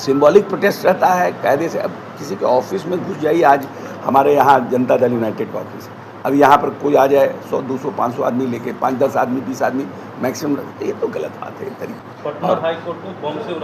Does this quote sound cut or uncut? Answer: cut